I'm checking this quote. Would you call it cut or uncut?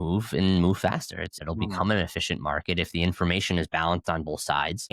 cut